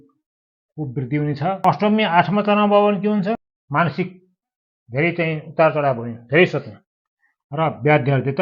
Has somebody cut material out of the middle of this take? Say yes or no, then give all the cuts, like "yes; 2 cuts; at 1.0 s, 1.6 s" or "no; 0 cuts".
yes; 1 cut; at 3.5 s